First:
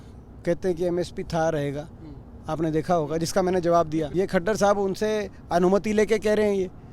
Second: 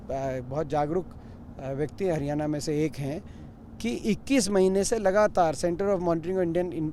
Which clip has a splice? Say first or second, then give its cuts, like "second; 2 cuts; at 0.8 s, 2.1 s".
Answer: first; 1 cut; at 4.1 s